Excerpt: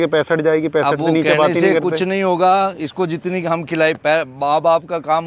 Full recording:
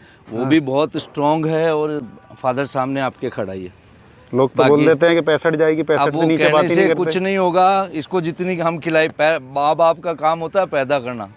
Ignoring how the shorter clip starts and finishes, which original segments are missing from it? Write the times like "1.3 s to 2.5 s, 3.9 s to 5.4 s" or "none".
none